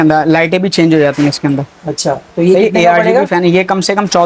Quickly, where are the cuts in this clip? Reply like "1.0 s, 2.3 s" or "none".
none